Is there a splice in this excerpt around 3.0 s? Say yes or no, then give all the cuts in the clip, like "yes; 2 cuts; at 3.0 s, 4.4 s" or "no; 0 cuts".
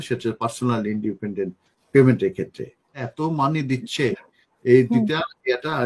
yes; 1 cut; at 3.0 s